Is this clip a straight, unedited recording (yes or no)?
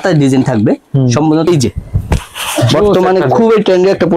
no